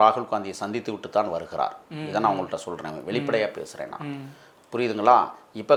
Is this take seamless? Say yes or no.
yes